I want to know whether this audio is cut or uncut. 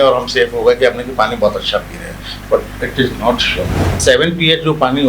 cut